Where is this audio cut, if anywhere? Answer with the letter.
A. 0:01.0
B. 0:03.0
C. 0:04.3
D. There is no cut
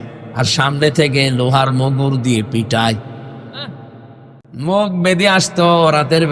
C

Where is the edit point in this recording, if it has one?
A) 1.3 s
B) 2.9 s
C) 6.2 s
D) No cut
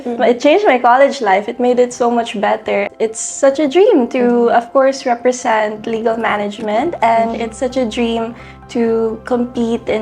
B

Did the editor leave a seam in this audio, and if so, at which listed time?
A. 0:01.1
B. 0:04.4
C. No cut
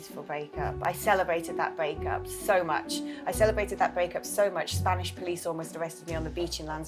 C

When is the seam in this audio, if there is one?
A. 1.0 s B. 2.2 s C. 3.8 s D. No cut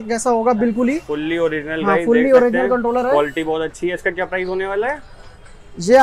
D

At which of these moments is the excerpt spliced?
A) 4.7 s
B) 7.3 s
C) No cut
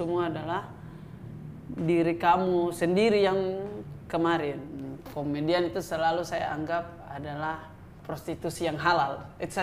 A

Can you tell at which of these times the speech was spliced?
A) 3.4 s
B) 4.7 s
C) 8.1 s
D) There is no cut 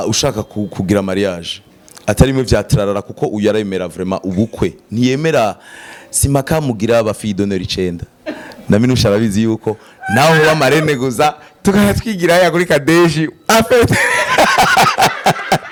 D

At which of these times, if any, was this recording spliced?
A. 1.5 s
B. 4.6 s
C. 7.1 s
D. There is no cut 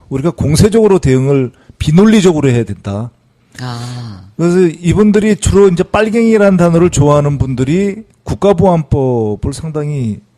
D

